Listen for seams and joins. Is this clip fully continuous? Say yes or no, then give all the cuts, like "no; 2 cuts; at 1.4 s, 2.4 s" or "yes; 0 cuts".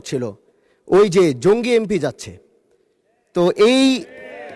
yes; 0 cuts